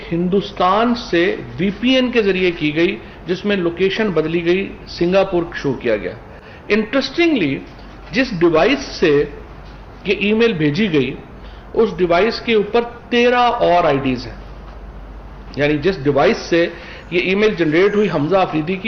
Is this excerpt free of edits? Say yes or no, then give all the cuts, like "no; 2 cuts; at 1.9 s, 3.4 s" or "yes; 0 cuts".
yes; 0 cuts